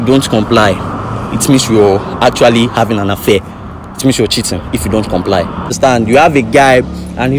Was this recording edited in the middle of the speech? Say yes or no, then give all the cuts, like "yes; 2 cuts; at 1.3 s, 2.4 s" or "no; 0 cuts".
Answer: yes; 1 cut; at 5.8 s